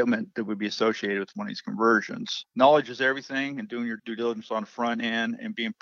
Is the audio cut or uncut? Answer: cut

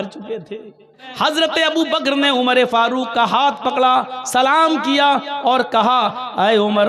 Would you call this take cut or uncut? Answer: cut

